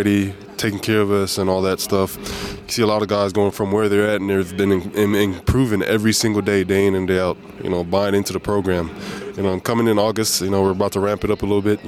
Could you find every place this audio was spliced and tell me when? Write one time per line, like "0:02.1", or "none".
0:02.1
0:03.5